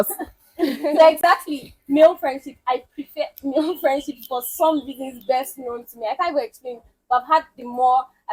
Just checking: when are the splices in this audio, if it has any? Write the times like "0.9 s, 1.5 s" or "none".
none